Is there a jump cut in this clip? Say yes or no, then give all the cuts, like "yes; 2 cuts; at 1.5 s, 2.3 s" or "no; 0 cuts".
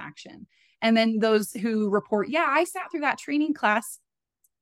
no; 0 cuts